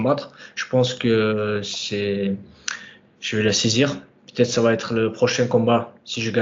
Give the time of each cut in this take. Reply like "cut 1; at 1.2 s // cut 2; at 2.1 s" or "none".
none